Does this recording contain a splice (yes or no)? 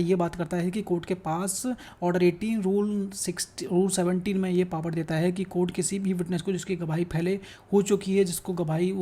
no